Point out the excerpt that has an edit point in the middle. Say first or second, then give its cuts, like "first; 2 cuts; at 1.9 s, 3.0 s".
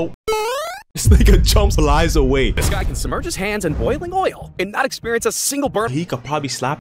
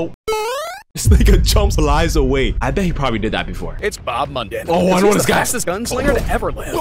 first; 2 cuts; at 2.6 s, 5.9 s